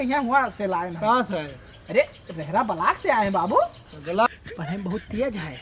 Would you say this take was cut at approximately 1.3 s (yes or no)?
no